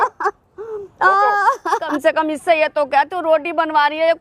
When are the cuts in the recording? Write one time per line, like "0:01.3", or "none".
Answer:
0:02.0